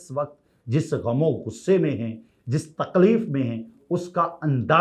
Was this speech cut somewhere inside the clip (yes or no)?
no